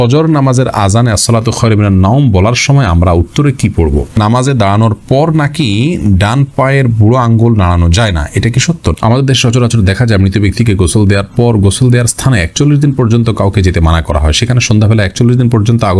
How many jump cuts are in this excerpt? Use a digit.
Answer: 2